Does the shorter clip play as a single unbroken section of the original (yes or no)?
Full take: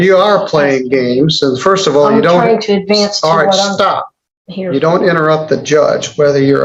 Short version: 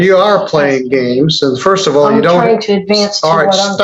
yes